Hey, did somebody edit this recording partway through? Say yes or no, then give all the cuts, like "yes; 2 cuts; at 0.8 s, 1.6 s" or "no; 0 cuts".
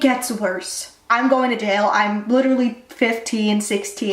yes; 1 cut; at 1.0 s